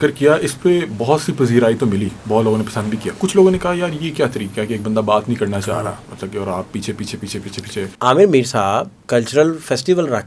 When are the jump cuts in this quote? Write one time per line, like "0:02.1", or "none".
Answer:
0:07.9
0:09.0